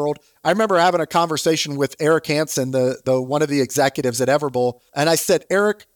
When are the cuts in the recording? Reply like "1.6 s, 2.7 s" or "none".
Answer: 4.8 s